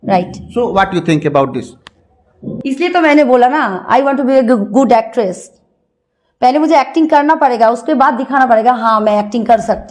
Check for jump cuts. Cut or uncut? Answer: uncut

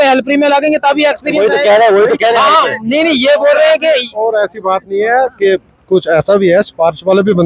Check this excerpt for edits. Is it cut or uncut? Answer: uncut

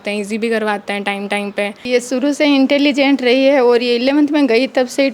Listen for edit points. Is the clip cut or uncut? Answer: cut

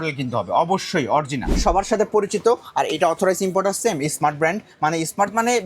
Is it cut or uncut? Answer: cut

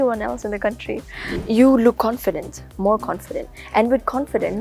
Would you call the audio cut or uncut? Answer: cut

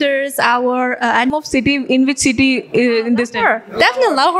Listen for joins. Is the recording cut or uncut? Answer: cut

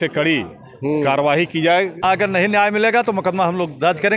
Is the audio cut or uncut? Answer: cut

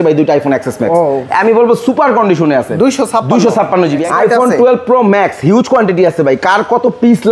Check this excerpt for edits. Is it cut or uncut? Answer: cut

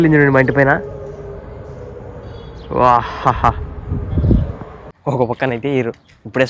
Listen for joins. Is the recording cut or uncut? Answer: uncut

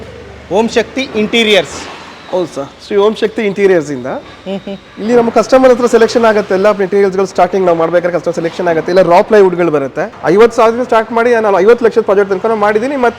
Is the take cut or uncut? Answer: cut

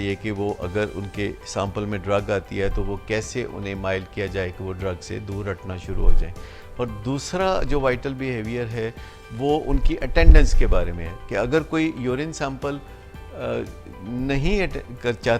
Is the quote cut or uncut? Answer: uncut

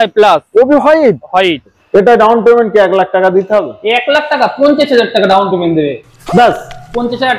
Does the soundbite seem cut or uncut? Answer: cut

